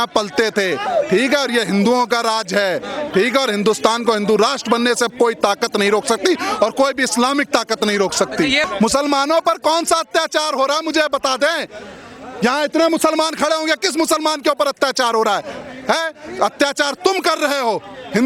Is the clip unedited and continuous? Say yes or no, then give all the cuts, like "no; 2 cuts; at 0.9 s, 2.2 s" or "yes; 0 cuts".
no; 1 cut; at 8.6 s